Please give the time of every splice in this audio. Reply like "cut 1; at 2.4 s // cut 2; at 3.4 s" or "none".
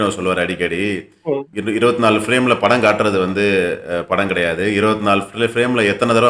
cut 1; at 1.5 s